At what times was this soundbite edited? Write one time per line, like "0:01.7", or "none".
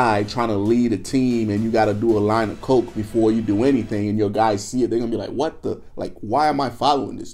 none